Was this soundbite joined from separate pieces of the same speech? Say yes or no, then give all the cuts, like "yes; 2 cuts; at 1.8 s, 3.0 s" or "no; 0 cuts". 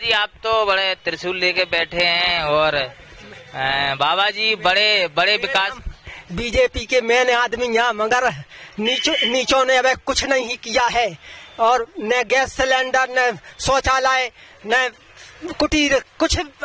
no; 0 cuts